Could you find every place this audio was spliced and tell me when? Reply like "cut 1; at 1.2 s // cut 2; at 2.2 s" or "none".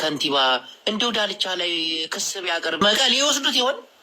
cut 1; at 2.8 s